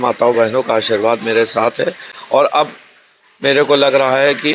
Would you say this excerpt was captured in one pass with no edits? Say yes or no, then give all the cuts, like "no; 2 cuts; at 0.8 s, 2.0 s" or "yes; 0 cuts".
yes; 0 cuts